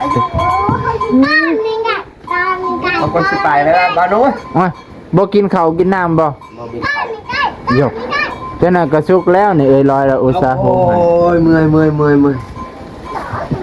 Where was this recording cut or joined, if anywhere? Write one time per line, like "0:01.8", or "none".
none